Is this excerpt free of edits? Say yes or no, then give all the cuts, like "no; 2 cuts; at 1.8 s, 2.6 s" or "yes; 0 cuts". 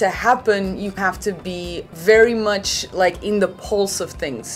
no; 1 cut; at 1.0 s